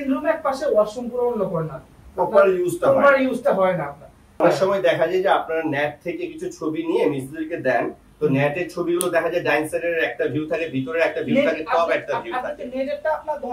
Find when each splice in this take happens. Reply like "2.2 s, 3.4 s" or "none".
4.4 s